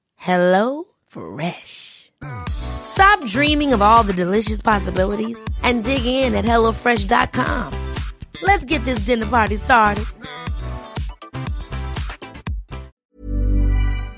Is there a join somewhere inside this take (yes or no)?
yes